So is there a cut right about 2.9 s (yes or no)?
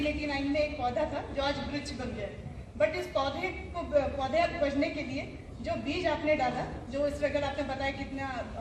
no